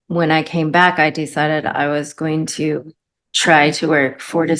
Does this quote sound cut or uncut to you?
uncut